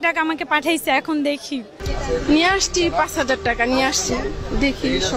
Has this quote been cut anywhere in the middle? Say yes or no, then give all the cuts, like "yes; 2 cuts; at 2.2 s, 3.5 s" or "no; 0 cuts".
yes; 1 cut; at 1.9 s